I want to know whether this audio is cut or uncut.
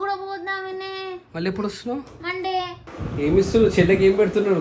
cut